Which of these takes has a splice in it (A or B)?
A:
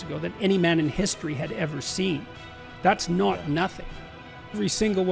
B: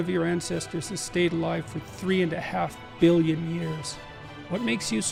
A